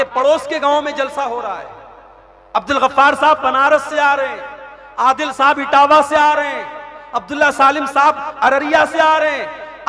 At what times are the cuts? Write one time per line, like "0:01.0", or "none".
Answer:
none